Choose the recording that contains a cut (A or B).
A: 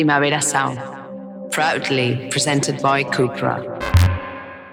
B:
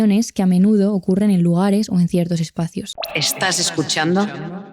B